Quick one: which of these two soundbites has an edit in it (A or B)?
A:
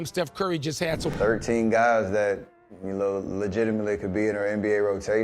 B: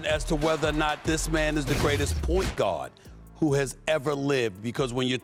A